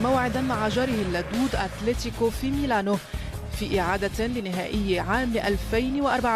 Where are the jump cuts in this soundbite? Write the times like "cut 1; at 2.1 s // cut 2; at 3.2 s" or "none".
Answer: cut 1; at 1.8 s